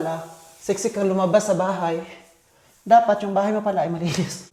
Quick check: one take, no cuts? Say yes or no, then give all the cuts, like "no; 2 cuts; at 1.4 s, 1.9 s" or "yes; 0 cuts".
yes; 0 cuts